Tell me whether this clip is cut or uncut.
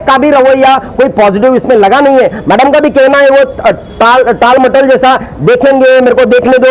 uncut